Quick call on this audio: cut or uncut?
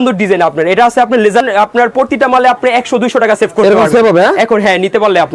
cut